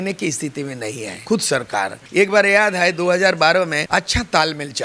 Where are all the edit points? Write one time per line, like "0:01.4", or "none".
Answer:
0:01.1
0:02.0
0:03.8